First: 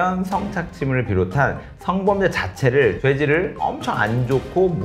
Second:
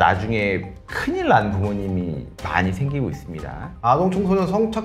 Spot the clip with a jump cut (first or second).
second